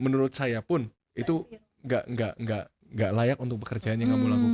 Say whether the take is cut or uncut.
cut